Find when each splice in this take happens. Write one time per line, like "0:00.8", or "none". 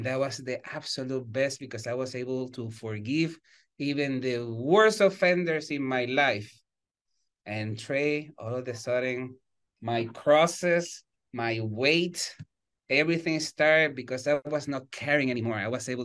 0:14.4